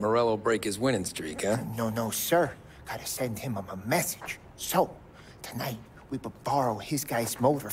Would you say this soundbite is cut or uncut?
uncut